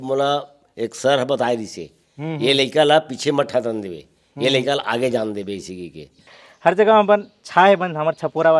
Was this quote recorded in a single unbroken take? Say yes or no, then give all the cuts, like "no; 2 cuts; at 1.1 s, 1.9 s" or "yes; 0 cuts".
no; 1 cut; at 6.3 s